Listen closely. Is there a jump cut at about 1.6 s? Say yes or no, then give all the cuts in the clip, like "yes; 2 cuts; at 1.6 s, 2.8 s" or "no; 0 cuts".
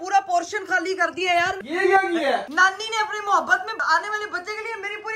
yes; 3 cuts; at 1.6 s, 2.5 s, 3.8 s